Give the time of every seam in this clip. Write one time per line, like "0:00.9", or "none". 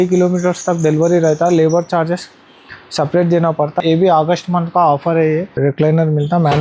0:03.8
0:05.6